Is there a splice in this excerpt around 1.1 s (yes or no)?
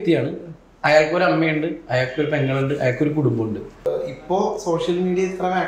no